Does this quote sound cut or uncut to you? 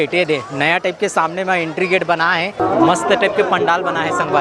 cut